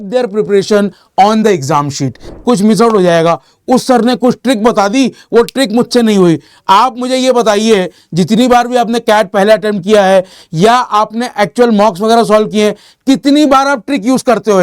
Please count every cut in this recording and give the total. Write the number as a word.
one